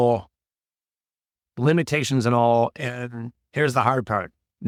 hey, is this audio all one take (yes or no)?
yes